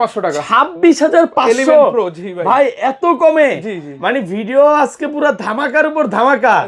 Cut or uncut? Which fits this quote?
uncut